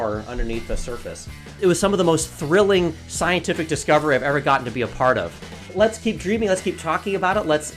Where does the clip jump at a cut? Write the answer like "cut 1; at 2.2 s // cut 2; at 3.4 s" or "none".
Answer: cut 1; at 1.6 s // cut 2; at 5.6 s